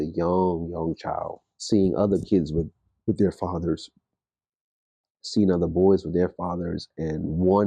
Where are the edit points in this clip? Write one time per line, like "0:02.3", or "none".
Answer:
0:01.5